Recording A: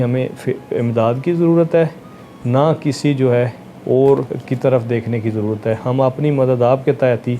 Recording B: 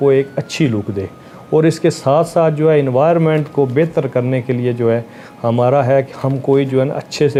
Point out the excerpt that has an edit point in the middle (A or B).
A